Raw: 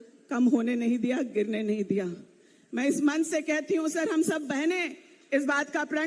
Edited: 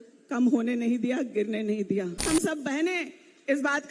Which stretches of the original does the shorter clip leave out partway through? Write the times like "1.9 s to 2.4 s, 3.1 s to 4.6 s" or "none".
2.3 s to 4.1 s